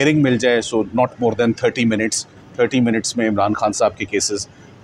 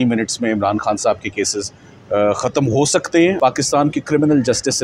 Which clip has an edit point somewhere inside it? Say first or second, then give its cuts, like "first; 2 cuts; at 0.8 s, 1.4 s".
second; 1 cut; at 3.4 s